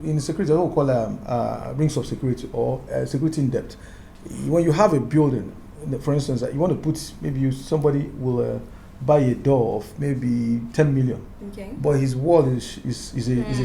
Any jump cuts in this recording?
no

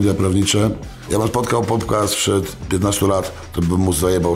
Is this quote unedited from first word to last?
no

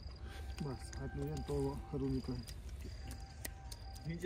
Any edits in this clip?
no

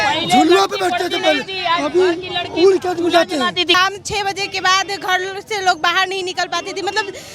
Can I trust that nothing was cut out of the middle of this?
no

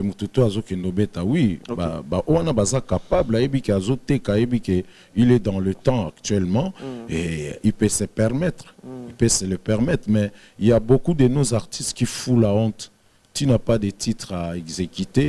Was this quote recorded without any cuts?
yes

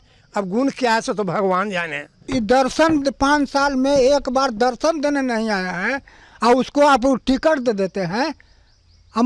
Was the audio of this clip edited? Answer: yes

